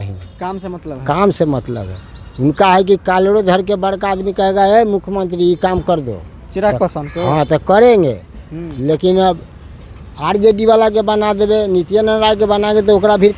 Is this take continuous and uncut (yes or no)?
yes